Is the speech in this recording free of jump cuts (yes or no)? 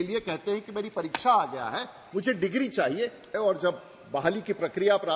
no